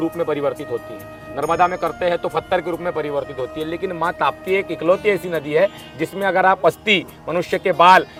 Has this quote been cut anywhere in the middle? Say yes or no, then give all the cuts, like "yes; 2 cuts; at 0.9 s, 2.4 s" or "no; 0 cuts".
no; 0 cuts